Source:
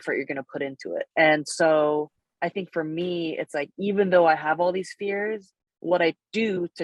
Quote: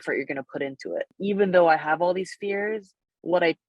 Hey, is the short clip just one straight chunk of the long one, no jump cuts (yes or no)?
no